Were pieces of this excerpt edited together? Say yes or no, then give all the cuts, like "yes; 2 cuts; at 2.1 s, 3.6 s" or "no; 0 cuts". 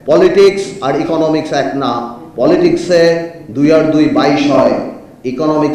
no; 0 cuts